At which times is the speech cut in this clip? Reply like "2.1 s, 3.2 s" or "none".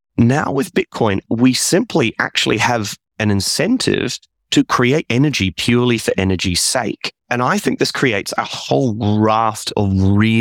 1.2 s, 3.0 s